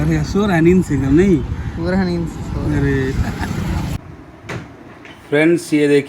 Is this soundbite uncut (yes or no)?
no